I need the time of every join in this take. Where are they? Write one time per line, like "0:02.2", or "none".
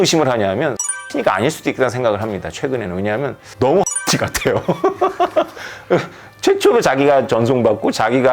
0:01.0